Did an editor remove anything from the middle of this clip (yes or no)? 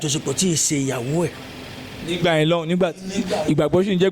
no